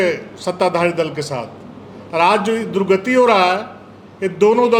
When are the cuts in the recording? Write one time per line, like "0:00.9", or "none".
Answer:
none